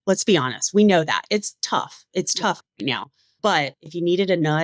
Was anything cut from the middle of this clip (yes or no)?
yes